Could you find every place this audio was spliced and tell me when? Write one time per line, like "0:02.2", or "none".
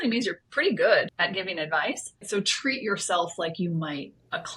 0:01.1
0:02.2